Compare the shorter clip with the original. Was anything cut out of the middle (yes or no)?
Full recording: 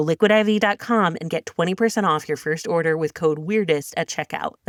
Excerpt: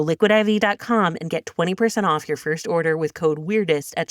no